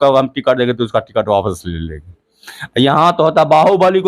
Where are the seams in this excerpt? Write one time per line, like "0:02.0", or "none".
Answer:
none